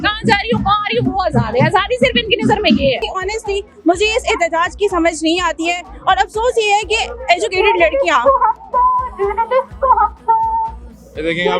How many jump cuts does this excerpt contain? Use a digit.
1